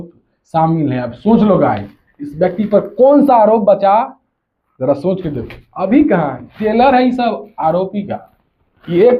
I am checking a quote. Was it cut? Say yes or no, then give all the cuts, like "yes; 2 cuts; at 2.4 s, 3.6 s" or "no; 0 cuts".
no; 0 cuts